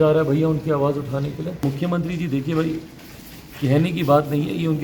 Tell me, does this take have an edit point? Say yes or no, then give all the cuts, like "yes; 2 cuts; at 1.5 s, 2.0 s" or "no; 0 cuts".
yes; 1 cut; at 1.6 s